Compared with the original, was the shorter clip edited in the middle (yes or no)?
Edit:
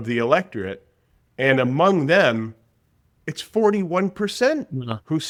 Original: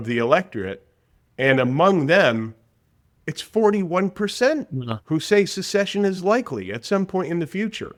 no